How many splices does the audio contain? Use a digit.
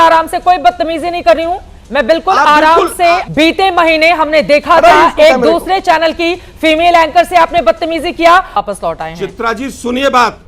2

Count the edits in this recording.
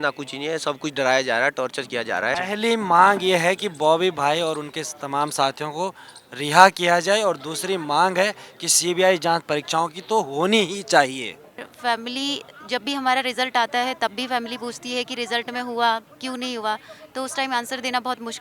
2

